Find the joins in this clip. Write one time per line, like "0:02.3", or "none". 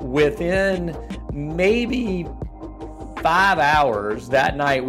none

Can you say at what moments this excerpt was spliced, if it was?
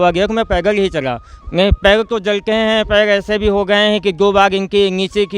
0:01.3

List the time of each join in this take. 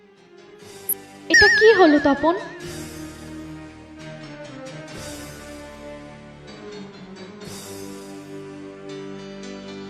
0:00.9

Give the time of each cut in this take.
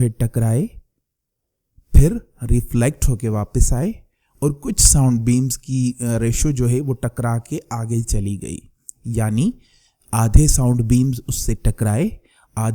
none

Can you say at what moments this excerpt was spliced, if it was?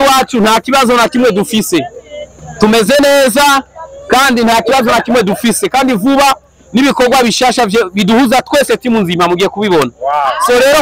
none

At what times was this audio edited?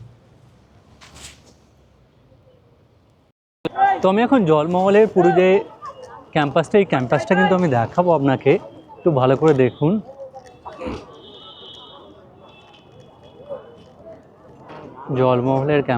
0:03.4

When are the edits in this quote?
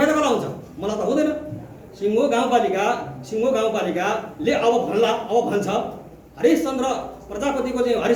none

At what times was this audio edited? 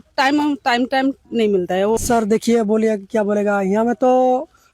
0:02.0

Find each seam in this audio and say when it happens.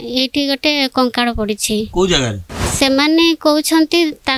0:02.7

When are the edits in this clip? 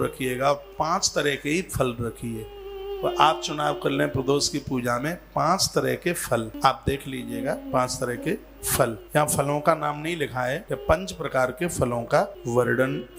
none

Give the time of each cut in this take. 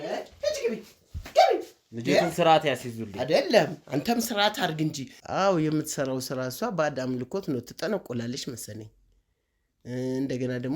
0:05.1

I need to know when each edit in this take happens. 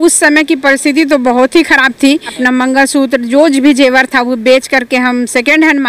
0:02.3

